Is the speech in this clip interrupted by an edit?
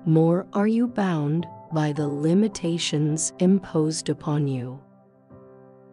yes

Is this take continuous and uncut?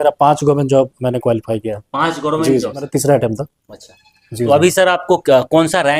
no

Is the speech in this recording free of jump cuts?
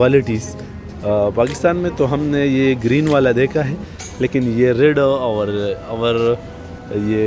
yes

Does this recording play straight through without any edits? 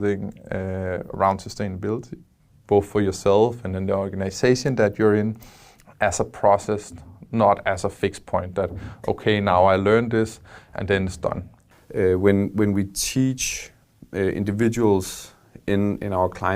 no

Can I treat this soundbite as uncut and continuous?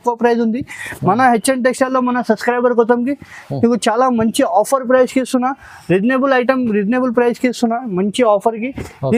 yes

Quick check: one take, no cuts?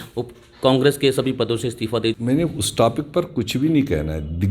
no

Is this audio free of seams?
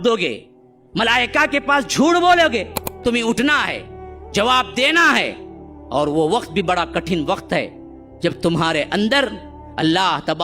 no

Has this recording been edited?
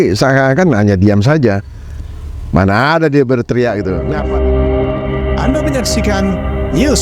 yes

